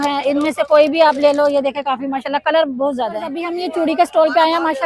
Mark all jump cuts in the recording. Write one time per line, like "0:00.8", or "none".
0:03.5